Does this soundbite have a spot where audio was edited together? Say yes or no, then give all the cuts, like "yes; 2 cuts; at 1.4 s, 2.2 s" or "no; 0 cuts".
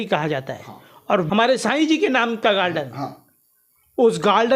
yes; 1 cut; at 1.3 s